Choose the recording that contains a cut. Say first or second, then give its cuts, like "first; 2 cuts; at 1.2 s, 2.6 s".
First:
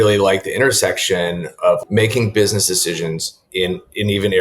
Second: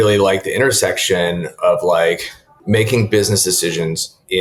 first; 1 cut; at 1.8 s